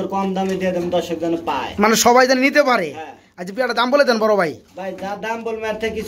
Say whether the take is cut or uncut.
uncut